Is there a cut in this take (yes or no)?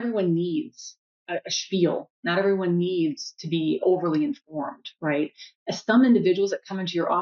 yes